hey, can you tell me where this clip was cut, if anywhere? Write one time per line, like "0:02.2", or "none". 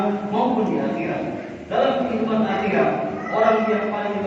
none